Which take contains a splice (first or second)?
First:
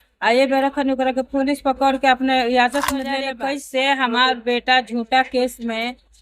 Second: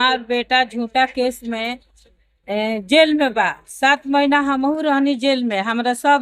first